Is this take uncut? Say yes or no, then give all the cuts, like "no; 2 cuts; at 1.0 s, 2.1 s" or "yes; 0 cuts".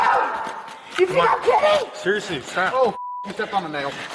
yes; 0 cuts